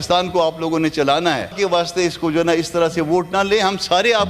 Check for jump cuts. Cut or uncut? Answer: cut